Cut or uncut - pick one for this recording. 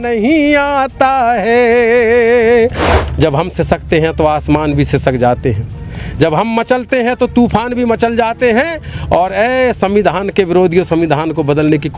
cut